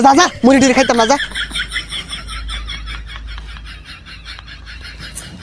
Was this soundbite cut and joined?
yes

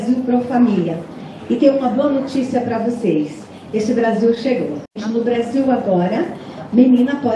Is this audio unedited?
no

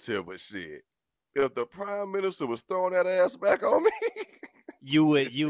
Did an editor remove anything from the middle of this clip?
no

